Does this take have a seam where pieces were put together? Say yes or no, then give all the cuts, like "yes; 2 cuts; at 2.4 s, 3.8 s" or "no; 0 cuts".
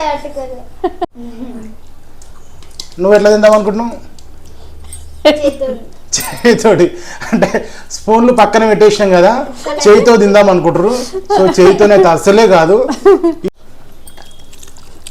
yes; 2 cuts; at 1.2 s, 13.5 s